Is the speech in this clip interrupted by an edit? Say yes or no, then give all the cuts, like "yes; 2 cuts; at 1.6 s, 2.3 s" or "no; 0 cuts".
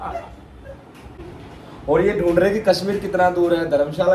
yes; 1 cut; at 1.2 s